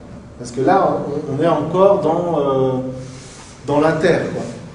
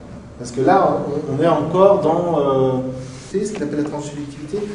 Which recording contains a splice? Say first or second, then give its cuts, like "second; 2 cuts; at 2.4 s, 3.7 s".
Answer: first; 1 cut; at 3.3 s